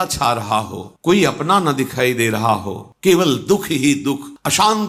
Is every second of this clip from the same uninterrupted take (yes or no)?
yes